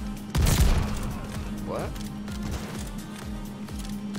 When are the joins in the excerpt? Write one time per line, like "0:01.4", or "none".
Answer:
none